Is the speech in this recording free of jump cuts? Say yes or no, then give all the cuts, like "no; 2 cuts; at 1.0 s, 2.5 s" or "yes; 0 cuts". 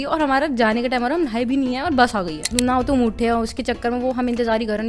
no; 1 cut; at 2.5 s